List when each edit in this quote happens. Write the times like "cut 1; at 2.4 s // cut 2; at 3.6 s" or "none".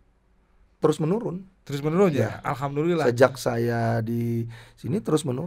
none